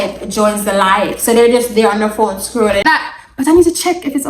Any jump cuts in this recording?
yes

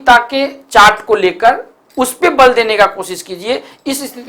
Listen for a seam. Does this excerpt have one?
no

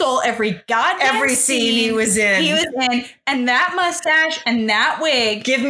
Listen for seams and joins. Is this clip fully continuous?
yes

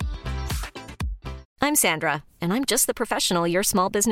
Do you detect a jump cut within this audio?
yes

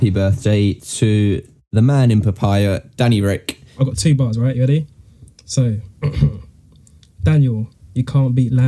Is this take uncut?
no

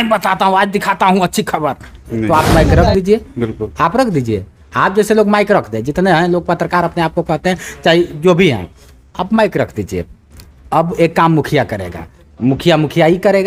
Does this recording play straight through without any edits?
yes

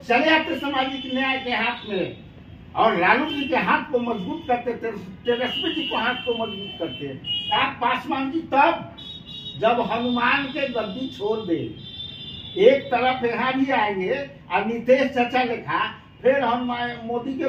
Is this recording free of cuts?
no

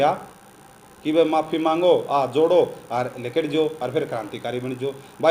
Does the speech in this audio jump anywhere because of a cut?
no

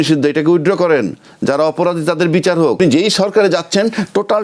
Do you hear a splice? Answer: yes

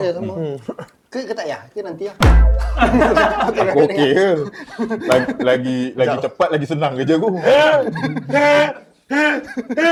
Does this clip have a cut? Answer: no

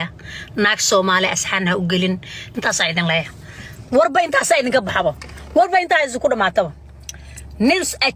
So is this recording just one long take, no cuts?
no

